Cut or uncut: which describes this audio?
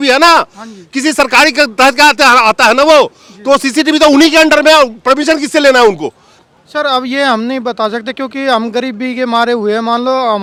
uncut